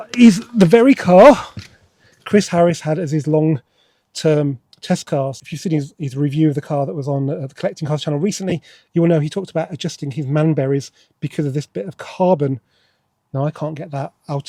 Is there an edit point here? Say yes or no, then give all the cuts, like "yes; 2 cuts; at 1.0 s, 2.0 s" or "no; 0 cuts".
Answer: no; 0 cuts